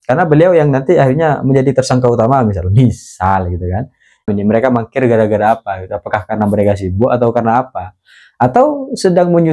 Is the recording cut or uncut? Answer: cut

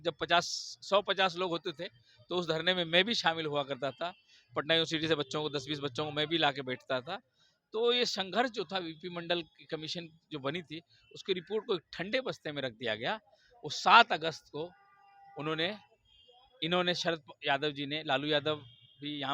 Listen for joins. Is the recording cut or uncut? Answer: uncut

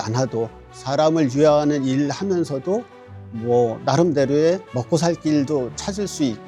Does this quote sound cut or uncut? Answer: uncut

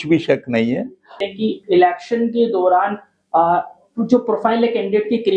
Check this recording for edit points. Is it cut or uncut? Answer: cut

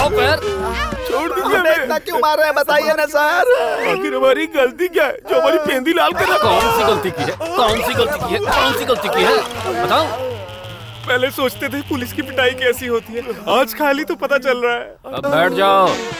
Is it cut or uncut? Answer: uncut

